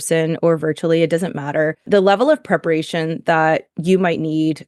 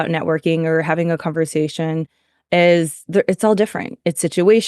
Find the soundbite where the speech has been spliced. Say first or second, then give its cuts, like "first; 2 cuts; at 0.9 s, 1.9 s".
first; 1 cut; at 1.8 s